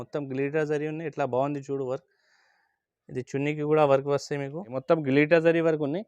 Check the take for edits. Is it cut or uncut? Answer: cut